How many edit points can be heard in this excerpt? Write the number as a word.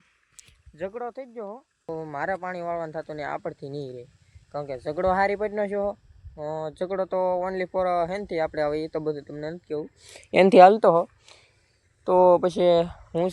one